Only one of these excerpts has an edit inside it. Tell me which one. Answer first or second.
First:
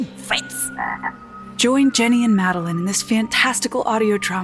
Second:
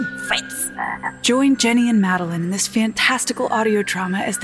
second